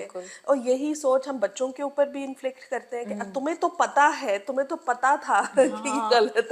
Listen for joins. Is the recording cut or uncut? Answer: uncut